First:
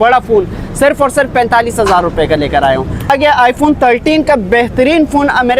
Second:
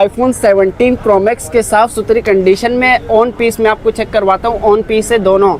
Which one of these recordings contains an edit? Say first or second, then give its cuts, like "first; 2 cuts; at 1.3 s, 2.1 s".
first; 1 cut; at 3.1 s